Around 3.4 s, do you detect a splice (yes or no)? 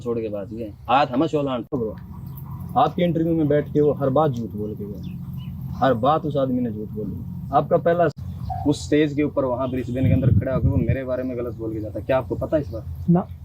no